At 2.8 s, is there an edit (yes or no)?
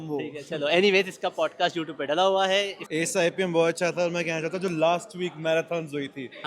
yes